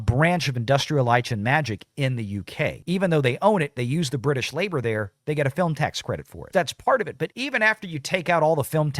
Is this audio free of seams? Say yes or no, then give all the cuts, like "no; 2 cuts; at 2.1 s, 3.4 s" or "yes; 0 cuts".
no; 3 cuts; at 2.8 s, 6.4 s, 7.3 s